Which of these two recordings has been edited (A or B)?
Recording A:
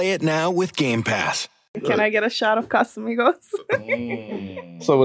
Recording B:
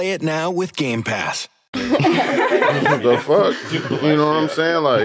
A